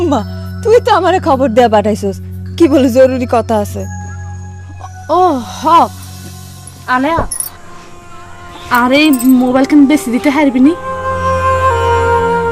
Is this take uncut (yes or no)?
no